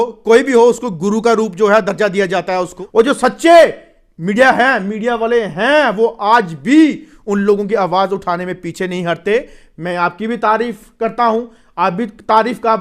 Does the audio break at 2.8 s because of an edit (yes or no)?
yes